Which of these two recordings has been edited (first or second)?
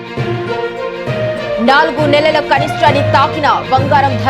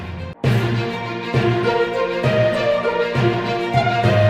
first